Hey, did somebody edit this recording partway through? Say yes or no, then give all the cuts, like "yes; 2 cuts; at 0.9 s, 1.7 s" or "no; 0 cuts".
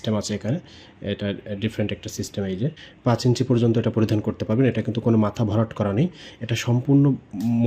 yes; 1 cut; at 2.9 s